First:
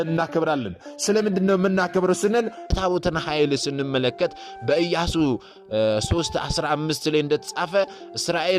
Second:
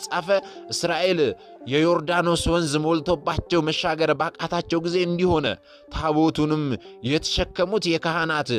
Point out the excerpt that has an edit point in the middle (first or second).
first